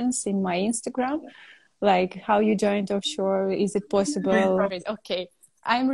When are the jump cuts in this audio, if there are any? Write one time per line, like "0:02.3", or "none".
0:04.8